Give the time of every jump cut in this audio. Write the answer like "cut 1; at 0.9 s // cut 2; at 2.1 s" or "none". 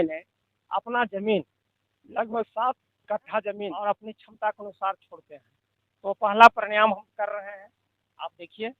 cut 1; at 3.7 s